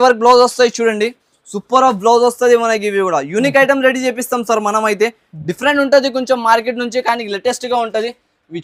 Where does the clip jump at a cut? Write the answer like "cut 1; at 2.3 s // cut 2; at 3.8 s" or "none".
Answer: none